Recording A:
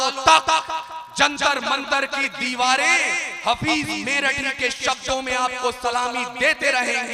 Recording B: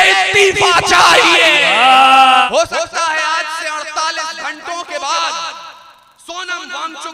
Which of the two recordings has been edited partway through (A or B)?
B